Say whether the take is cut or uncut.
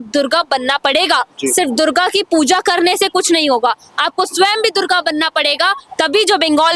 uncut